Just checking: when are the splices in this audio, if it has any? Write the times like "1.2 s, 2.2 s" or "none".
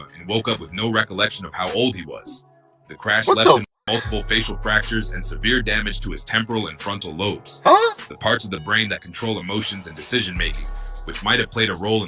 none